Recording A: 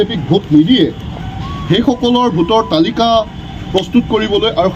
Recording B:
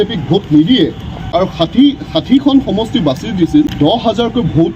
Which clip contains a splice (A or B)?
B